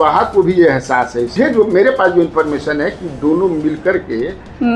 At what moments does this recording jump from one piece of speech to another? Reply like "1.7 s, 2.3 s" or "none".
1.3 s